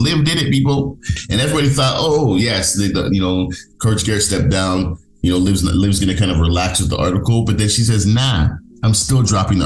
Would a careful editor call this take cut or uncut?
cut